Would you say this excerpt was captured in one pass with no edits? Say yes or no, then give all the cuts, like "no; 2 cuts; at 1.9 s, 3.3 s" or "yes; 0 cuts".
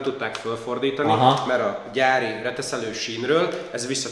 yes; 0 cuts